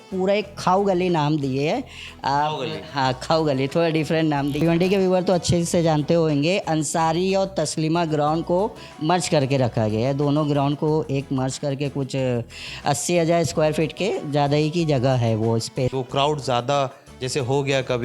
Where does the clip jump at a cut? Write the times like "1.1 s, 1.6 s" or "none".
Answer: 4.6 s, 15.9 s